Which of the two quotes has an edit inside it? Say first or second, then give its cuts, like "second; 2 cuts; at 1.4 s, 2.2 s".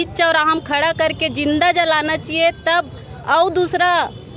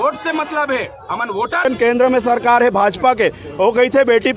second; 1 cut; at 1.7 s